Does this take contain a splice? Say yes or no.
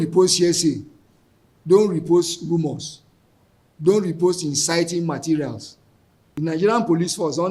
yes